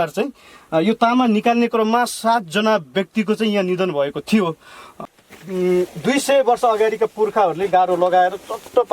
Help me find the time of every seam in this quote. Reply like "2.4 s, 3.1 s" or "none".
5.1 s